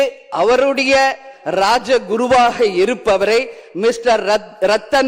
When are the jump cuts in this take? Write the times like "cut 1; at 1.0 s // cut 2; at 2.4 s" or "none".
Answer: none